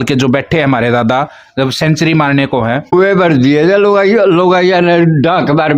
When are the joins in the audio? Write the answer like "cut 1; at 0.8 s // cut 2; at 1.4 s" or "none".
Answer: cut 1; at 2.9 s

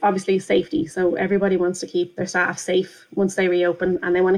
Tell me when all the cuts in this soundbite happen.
none

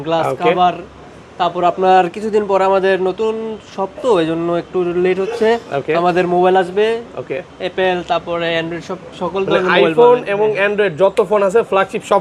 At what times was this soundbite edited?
none

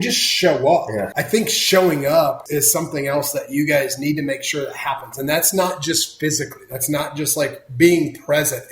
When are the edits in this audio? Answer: cut 1; at 1.0 s // cut 2; at 2.4 s

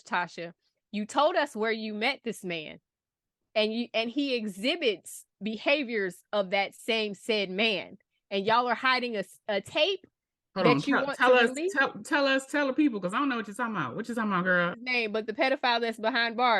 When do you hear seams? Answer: cut 1; at 14.8 s

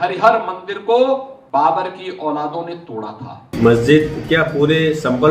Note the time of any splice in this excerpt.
cut 1; at 1.3 s // cut 2; at 3.3 s

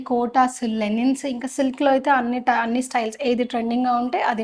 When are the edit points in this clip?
none

